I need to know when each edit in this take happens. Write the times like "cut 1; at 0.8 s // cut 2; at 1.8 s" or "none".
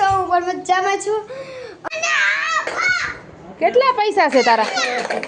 cut 1; at 1.7 s